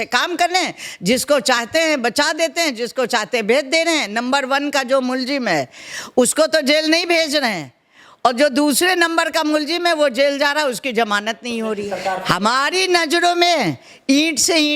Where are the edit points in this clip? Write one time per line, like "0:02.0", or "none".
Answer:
0:11.9